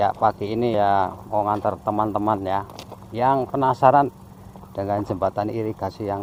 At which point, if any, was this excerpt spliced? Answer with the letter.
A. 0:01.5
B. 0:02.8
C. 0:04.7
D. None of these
D